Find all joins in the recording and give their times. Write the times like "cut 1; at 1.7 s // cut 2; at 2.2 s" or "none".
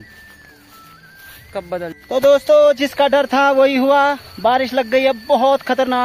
cut 1; at 1.9 s